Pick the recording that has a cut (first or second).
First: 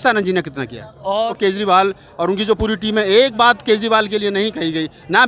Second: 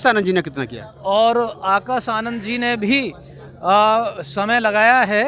first